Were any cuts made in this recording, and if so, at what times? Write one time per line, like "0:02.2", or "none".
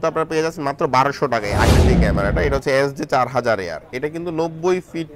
0:01.7